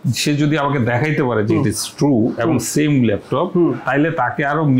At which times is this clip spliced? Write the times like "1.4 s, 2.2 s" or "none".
none